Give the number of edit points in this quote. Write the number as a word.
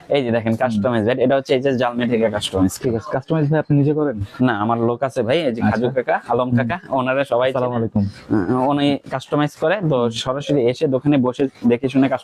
zero